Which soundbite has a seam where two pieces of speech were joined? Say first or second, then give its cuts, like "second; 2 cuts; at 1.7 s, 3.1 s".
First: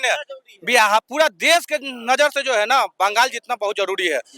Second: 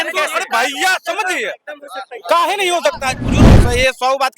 second; 1 cut; at 3.3 s